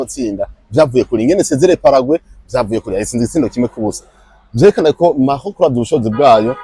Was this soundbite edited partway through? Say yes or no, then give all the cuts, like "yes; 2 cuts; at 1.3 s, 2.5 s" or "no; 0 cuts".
no; 0 cuts